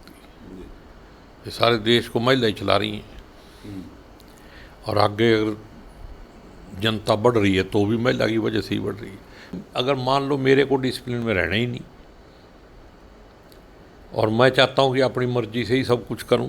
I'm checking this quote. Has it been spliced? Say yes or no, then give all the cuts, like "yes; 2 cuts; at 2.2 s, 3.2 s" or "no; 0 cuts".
yes; 1 cut; at 9.6 s